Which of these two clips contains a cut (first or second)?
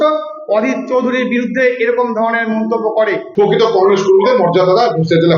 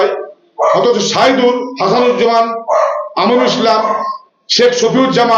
first